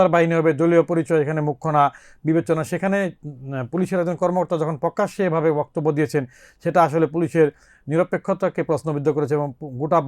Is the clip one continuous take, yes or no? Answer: yes